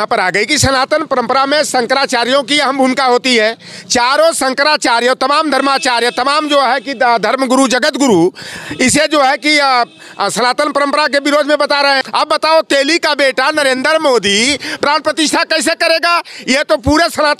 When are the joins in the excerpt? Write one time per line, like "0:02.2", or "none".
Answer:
0:12.0